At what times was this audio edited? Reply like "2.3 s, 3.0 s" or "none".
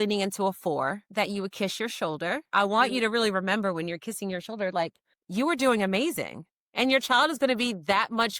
1.0 s, 2.5 s